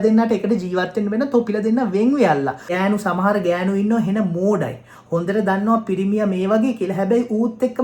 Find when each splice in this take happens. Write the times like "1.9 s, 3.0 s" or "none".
2.6 s